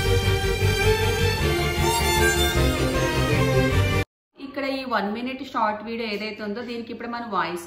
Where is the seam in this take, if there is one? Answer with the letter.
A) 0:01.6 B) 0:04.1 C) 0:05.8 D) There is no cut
B